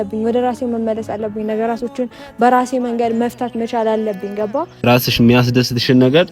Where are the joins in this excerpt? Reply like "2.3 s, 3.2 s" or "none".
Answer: 4.7 s